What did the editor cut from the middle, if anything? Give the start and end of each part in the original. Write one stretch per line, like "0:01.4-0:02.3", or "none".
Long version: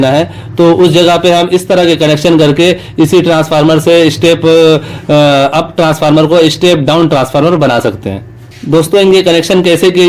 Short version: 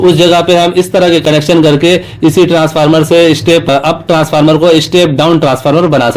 0:04.4-0:05.4

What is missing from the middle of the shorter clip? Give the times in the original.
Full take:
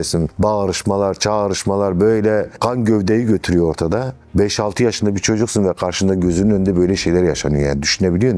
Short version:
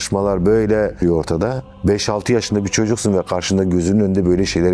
0:02.5-0:03.5

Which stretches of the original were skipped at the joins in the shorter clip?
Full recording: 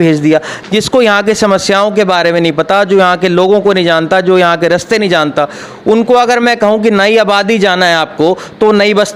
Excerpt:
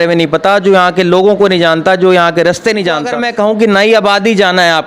0:05.4-0:06.4

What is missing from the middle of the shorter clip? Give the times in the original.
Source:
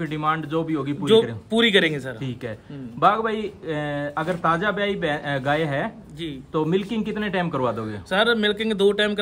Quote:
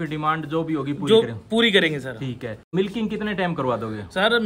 0:02.7-0:06.7

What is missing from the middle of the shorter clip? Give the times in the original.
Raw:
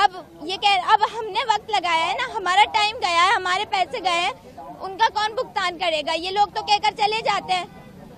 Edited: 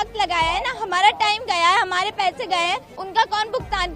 0:04.5-0:04.8

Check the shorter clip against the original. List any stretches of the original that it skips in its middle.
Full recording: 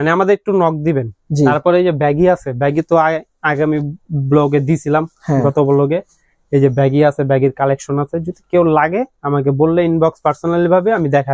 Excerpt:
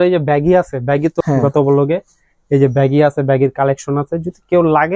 0:02.9-0:05.2

